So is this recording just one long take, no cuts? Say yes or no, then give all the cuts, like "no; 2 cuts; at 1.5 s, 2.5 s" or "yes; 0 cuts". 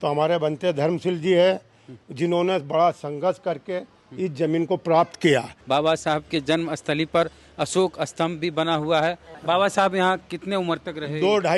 no; 2 cuts; at 5.5 s, 9.3 s